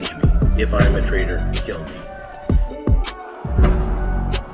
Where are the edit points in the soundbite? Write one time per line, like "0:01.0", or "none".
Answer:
0:02.1